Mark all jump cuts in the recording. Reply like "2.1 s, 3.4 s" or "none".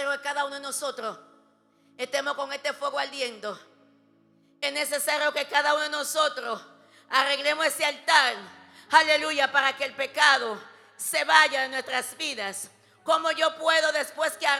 none